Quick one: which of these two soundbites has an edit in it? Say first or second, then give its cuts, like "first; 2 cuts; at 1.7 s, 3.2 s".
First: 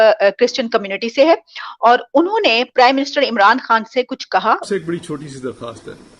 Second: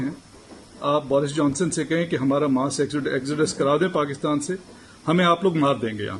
first; 1 cut; at 4.6 s